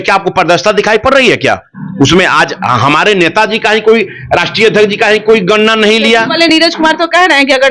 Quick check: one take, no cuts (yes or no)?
yes